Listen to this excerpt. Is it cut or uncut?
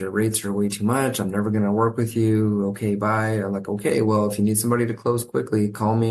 uncut